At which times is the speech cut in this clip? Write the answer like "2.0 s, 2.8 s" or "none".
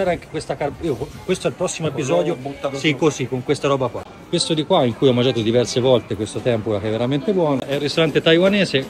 4.1 s, 7.7 s